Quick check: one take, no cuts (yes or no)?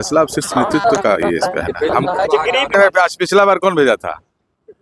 no